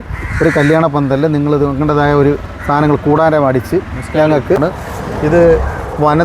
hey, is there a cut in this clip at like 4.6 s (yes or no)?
yes